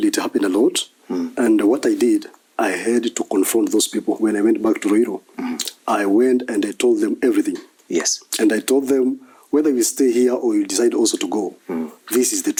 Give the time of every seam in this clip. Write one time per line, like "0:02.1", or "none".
none